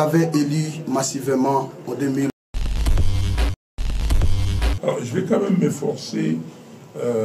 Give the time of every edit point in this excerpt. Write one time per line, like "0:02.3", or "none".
0:02.4
0:04.8